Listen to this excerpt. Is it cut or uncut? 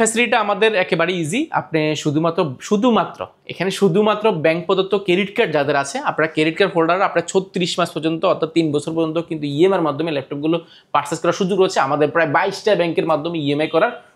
uncut